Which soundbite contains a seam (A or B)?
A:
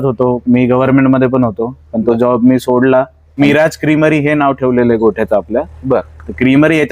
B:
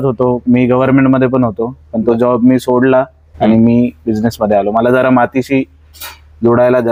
A